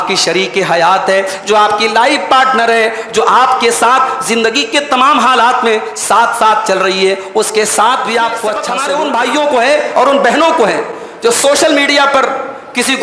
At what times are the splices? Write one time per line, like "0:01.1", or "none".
0:08.7

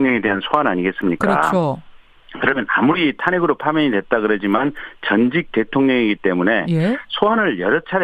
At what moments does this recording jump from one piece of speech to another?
0:05.5

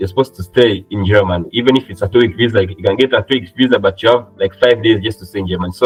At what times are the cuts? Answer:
none

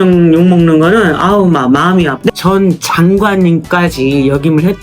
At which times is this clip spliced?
0:02.3

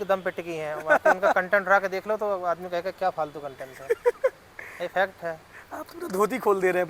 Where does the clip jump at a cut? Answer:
none

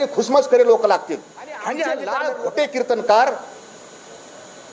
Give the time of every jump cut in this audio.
0:02.1

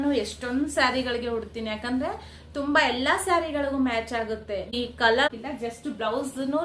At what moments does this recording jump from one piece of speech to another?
0:05.3

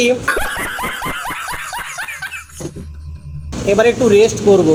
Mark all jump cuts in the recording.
none

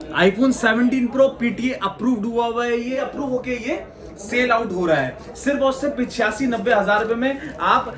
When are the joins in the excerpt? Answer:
0:03.0

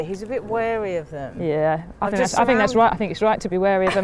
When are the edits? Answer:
none

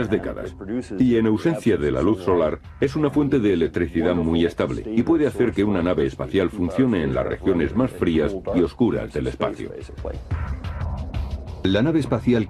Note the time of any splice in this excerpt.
none

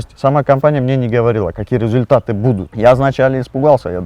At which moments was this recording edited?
0:02.7

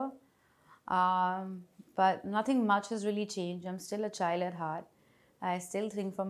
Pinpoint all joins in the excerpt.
none

